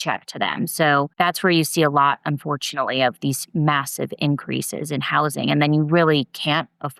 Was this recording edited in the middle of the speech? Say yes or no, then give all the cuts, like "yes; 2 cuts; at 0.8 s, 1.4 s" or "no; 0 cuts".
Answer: yes; 1 cut; at 1.1 s